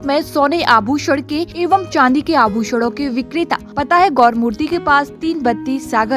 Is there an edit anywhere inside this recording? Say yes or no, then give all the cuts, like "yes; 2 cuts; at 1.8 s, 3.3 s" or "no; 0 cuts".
yes; 2 cuts; at 1.5 s, 3.7 s